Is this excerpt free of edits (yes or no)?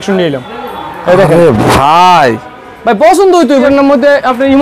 no